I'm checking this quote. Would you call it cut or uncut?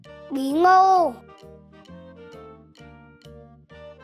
uncut